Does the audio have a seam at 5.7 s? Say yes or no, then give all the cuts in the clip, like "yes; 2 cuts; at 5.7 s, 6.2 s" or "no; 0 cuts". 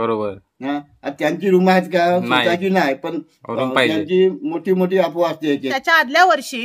yes; 1 cut; at 5.7 s